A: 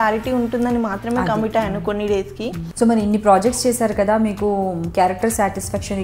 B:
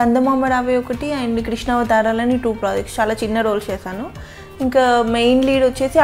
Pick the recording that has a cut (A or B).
A